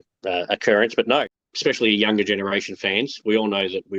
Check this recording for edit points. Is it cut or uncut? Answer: cut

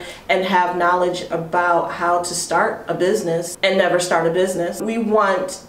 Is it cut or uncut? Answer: cut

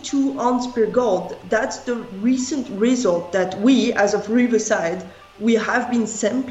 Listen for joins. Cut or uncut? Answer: uncut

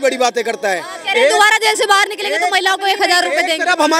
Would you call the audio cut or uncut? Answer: uncut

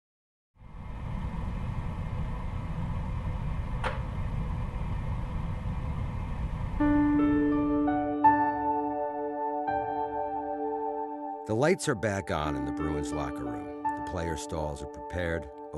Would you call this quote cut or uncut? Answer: cut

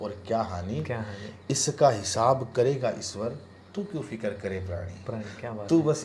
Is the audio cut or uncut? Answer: uncut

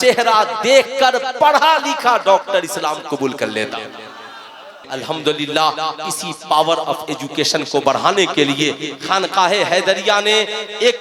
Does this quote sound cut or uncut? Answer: cut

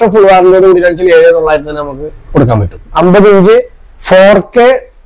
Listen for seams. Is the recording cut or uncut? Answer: cut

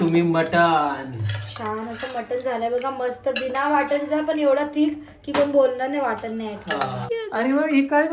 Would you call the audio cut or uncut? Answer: cut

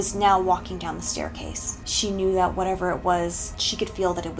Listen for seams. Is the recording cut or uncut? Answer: cut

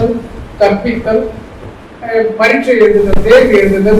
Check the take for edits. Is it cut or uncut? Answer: uncut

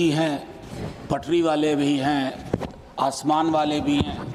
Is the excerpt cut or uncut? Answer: uncut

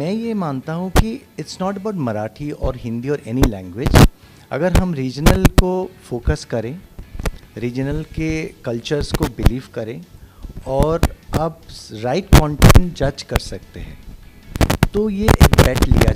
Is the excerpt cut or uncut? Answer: uncut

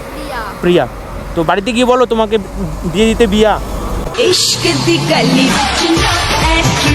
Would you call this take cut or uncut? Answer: cut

